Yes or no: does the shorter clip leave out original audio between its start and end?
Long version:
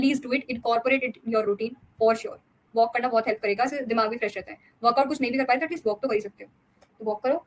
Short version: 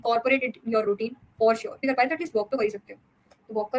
yes